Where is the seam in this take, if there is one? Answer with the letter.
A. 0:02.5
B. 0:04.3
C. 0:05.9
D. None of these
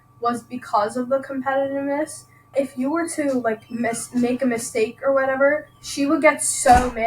A